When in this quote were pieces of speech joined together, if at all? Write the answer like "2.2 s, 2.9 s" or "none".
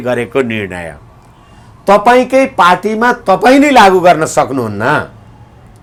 none

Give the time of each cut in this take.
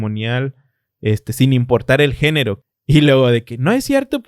2.6 s

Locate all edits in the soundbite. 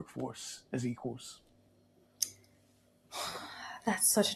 none

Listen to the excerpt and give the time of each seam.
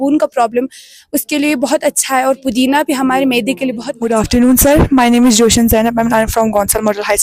none

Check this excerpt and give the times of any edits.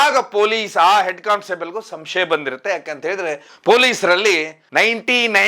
3.5 s

